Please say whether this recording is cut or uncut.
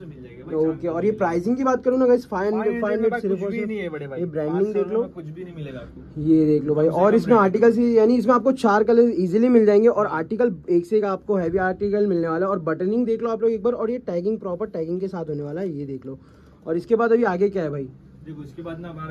uncut